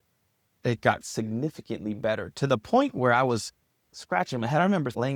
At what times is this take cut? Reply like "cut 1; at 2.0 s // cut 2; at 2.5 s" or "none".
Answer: none